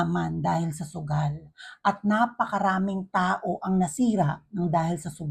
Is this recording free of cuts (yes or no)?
yes